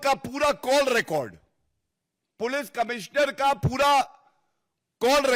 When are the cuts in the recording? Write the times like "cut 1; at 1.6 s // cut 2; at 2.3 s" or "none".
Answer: none